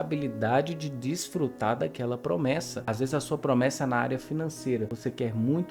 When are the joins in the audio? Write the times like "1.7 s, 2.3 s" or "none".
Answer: none

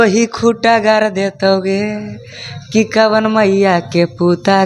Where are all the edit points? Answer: none

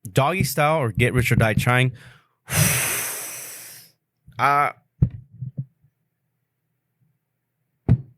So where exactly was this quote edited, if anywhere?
4.2 s

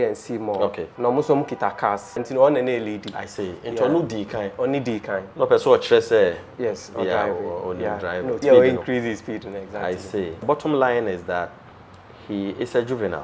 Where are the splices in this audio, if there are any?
0.8 s, 2.2 s, 8.4 s, 10.4 s

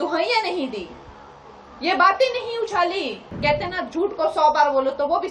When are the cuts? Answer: 3.3 s

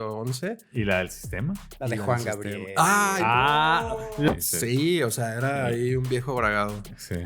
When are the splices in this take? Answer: 4.3 s

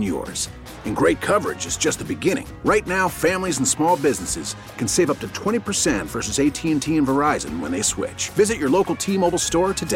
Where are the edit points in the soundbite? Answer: none

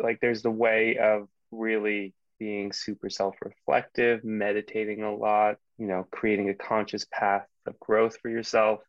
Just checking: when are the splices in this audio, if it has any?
2.2 s, 5.7 s

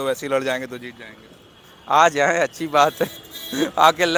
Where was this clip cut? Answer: none

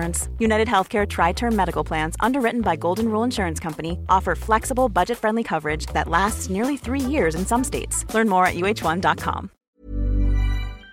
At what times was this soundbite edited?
9.5 s

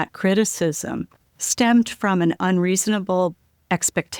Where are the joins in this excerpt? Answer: 1.2 s

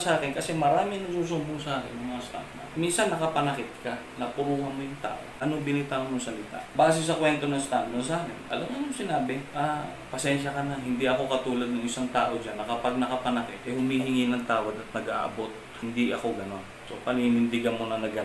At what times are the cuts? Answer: 5.3 s, 6.6 s, 8.4 s, 9.5 s, 13.6 s

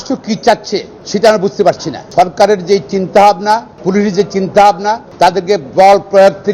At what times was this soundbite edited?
1.0 s, 1.9 s, 3.7 s, 5.1 s

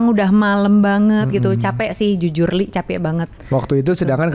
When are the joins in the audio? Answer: none

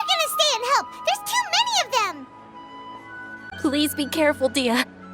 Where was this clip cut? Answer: 3.5 s

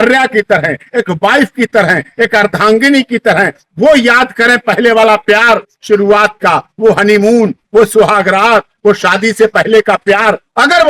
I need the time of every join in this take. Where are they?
none

